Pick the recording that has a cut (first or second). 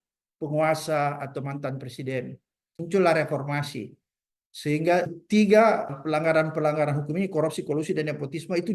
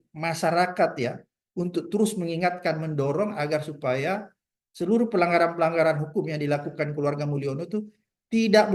first